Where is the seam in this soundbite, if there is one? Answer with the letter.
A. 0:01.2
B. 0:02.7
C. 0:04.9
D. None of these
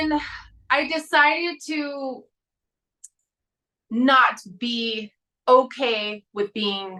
D